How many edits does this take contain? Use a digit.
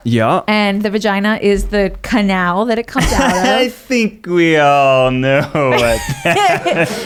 0